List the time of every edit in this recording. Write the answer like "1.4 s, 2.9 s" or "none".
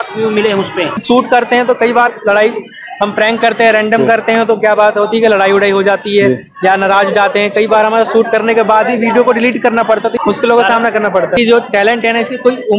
1.0 s, 11.4 s